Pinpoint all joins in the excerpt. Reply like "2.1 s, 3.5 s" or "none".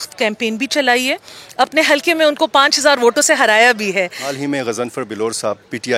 4.4 s